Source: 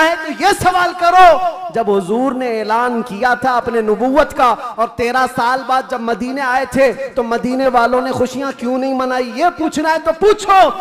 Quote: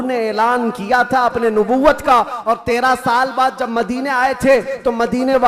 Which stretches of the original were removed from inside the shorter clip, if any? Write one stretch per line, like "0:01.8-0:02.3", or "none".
none